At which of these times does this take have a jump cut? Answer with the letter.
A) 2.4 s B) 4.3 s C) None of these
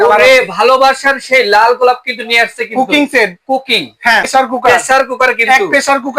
B